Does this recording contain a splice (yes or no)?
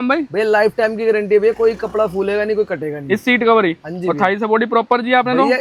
no